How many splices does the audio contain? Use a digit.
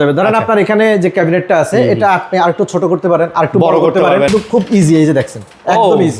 1